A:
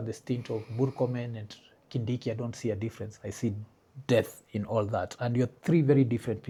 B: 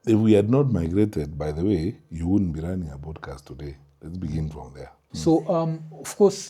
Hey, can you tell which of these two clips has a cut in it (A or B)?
B